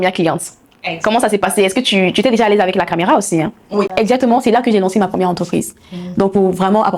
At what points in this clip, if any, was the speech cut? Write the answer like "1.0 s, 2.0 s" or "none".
3.9 s